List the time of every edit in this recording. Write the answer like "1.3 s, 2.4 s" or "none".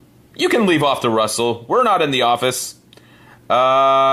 1.2 s